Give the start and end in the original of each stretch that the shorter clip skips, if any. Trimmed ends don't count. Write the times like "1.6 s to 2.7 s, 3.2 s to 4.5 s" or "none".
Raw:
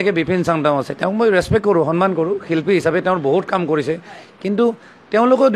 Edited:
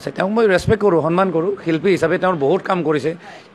none